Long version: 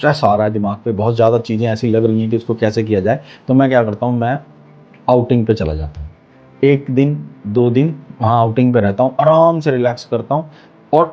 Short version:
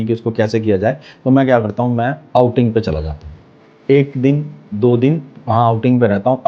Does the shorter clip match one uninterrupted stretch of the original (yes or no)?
no